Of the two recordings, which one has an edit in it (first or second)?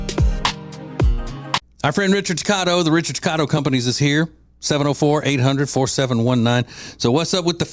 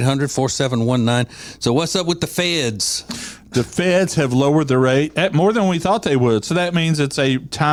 first